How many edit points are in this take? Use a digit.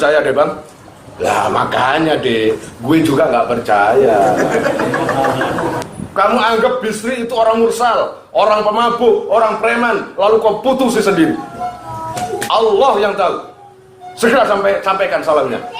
1